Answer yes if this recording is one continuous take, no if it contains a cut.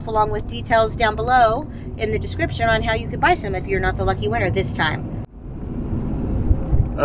no